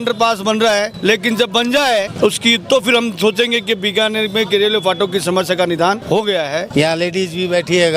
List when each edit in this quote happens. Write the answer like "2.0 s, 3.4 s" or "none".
0.9 s, 2.1 s, 6.3 s